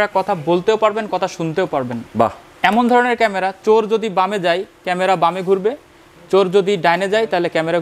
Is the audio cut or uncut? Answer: uncut